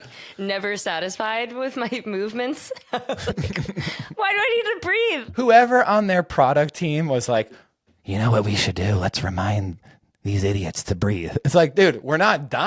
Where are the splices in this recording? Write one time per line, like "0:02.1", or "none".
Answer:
0:05.4